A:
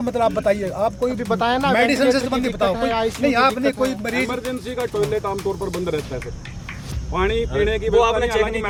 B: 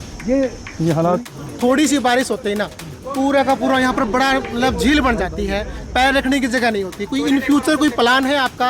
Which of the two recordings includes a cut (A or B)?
B